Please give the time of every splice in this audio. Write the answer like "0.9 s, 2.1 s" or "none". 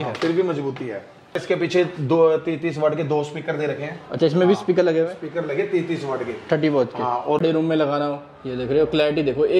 1.4 s, 7.4 s